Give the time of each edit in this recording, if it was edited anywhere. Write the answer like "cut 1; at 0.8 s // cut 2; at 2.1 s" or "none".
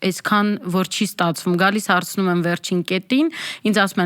none